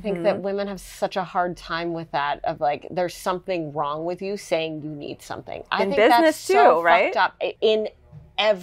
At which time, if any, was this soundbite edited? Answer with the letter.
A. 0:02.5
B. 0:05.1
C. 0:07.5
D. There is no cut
C